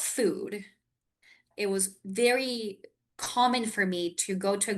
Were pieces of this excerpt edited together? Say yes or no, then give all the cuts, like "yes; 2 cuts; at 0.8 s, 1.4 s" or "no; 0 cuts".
yes; 1 cut; at 1.5 s